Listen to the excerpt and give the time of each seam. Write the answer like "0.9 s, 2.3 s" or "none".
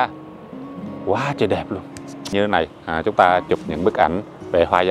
2.3 s